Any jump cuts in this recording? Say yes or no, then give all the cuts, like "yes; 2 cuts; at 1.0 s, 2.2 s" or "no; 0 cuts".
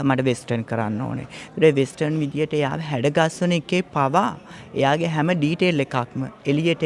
no; 0 cuts